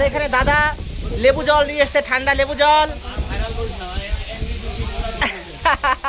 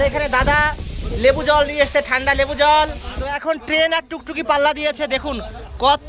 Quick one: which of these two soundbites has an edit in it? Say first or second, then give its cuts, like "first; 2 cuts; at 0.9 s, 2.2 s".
second; 1 cut; at 3.1 s